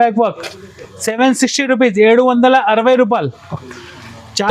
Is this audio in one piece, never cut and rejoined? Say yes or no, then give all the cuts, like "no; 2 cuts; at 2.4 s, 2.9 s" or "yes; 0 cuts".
yes; 0 cuts